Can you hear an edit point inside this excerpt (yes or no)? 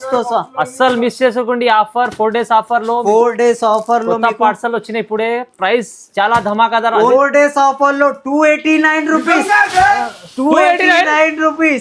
yes